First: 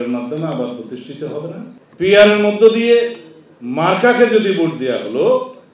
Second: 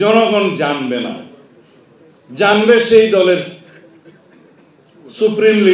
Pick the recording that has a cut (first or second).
first